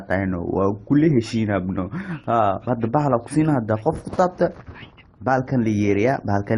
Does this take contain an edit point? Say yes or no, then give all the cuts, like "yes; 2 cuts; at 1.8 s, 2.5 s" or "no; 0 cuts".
yes; 1 cut; at 2.6 s